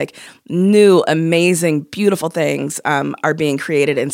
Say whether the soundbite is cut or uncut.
uncut